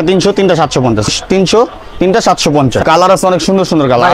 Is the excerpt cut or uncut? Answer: cut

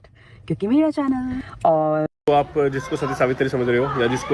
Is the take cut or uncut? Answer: cut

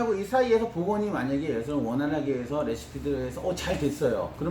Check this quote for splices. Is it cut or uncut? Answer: uncut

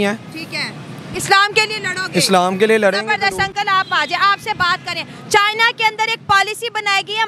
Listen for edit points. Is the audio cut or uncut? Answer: uncut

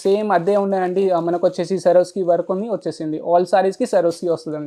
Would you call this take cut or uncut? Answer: uncut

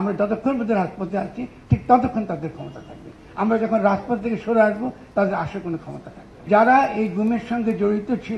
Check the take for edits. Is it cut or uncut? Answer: cut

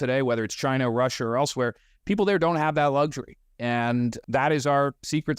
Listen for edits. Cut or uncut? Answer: cut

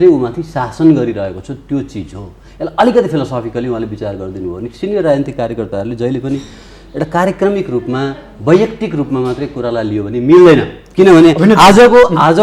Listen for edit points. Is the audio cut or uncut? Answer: uncut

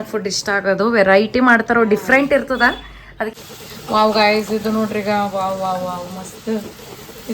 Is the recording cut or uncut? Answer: cut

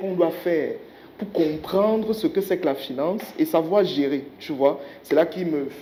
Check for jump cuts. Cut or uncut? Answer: uncut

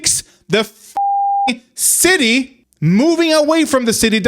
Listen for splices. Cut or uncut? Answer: cut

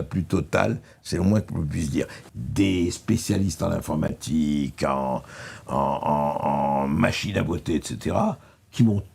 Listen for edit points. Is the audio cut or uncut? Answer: cut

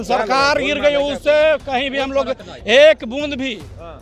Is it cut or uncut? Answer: uncut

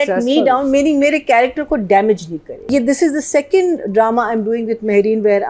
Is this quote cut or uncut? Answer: cut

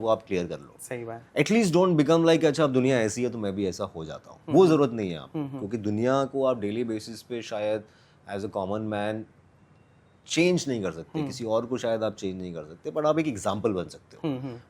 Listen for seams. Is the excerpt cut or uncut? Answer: uncut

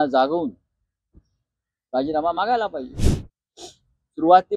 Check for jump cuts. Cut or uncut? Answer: cut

